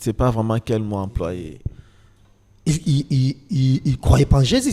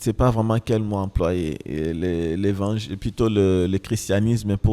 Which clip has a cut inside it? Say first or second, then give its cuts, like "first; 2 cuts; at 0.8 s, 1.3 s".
first; 1 cut; at 1.5 s